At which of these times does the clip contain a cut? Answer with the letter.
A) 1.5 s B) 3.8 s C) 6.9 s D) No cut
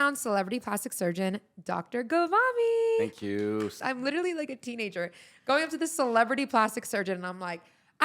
B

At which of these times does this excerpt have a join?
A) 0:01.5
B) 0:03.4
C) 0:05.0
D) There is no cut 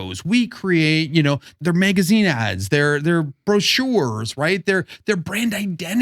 A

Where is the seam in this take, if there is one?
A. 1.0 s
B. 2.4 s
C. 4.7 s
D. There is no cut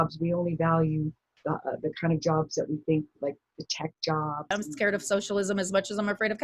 C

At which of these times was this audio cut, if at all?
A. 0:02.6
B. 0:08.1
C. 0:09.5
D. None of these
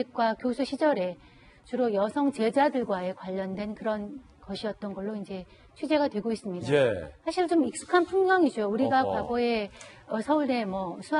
C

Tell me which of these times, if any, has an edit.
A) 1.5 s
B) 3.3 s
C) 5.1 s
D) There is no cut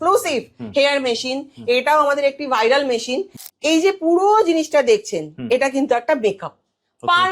B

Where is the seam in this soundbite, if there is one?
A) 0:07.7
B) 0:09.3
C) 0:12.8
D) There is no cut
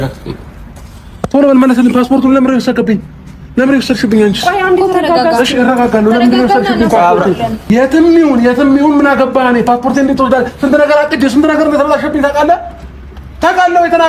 A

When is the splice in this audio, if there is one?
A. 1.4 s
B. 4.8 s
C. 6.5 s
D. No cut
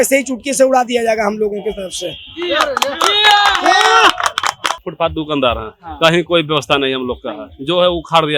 B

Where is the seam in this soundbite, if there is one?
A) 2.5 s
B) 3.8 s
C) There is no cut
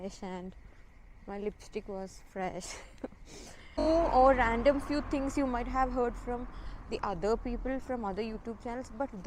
B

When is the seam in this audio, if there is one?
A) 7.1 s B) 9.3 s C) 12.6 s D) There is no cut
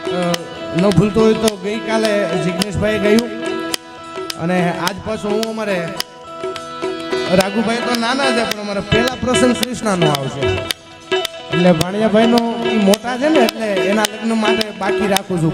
A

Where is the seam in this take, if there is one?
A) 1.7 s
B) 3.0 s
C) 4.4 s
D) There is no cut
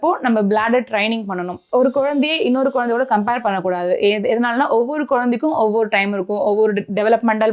A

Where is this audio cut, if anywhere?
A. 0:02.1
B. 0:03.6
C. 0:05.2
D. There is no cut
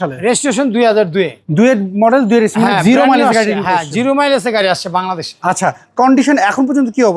D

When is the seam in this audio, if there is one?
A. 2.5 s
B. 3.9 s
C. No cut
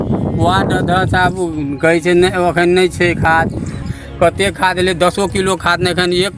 B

